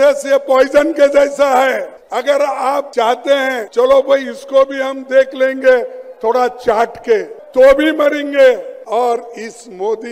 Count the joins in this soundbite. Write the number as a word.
five